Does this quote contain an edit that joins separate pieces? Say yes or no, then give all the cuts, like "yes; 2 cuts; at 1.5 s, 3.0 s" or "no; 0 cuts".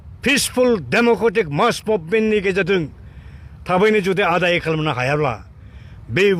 no; 0 cuts